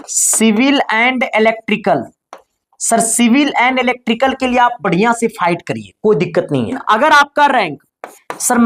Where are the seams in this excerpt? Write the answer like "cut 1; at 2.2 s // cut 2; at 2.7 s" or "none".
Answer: cut 1; at 6.8 s